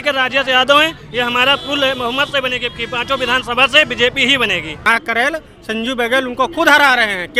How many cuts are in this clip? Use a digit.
1